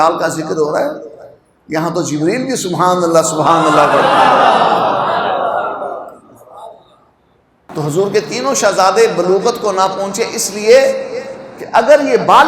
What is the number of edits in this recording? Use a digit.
1